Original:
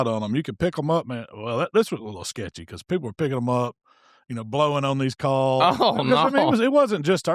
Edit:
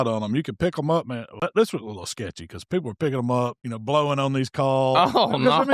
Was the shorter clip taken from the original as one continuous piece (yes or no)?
no